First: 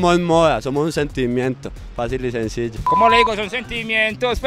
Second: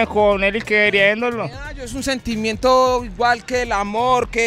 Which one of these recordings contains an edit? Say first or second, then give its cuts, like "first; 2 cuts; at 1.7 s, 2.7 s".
first; 1 cut; at 2.8 s